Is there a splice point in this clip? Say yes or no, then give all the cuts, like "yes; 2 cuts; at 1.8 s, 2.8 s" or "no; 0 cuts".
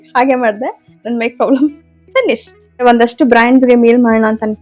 yes; 1 cut; at 2.8 s